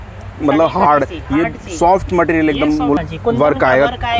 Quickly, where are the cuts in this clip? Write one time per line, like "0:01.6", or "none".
0:03.0